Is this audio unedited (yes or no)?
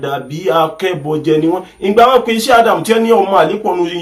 yes